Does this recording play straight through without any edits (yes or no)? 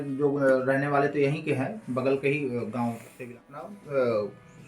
no